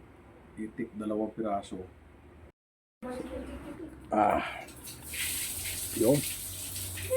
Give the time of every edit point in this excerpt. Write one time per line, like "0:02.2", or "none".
0:02.6